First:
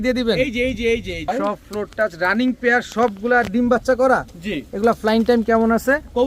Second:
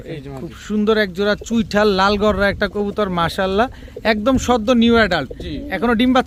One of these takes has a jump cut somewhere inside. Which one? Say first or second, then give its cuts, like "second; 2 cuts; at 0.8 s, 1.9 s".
first; 1 cut; at 1.2 s